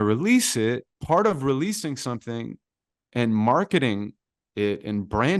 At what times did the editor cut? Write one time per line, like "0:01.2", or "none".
0:00.9